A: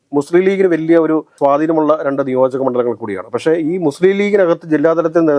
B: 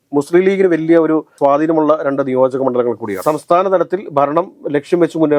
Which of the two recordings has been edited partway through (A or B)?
B